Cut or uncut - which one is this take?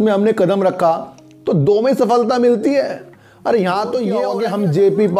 cut